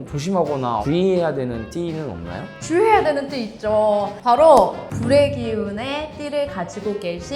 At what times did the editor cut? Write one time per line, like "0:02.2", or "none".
none